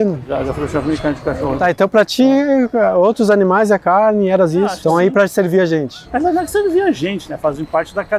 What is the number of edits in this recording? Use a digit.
2